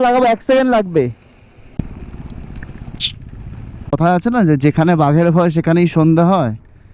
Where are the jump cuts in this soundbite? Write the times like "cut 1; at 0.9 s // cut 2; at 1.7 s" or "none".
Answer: cut 1; at 1.7 s // cut 2; at 3.9 s